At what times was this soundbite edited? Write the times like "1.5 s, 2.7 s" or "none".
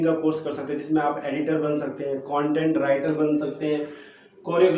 none

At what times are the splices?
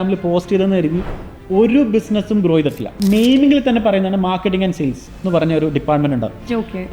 2.9 s

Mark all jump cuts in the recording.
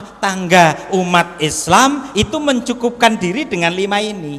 none

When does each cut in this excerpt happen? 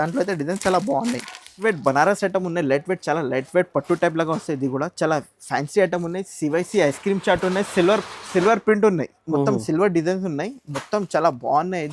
1.4 s

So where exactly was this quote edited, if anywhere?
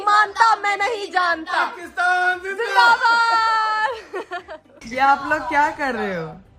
none

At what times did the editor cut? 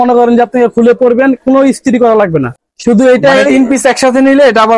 2.5 s

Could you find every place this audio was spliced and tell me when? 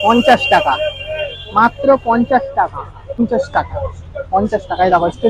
3.2 s

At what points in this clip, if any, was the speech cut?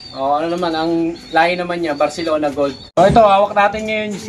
2.8 s

